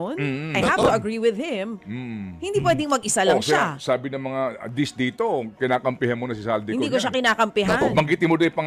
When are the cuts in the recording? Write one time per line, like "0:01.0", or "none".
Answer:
none